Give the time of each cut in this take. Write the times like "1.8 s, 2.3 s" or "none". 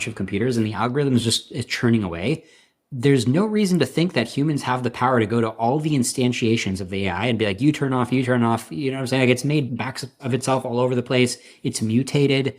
none

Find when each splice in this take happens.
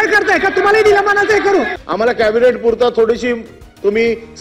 1.8 s

